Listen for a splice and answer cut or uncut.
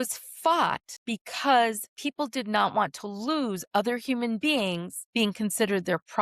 cut